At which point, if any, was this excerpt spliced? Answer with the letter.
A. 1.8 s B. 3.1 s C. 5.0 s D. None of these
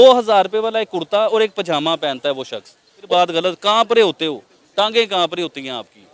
B